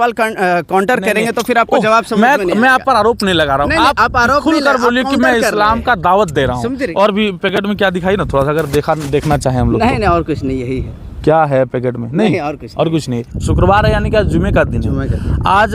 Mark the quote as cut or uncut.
cut